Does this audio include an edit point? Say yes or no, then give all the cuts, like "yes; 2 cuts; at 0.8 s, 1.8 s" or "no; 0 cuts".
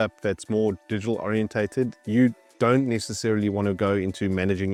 no; 0 cuts